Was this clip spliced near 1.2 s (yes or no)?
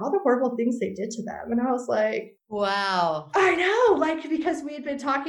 no